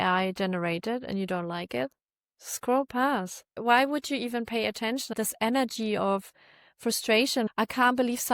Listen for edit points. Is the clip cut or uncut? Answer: cut